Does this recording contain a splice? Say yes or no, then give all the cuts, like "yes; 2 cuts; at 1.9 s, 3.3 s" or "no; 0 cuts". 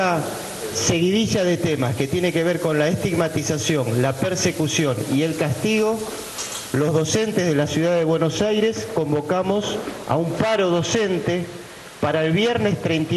no; 0 cuts